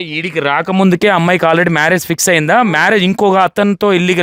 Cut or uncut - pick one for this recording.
uncut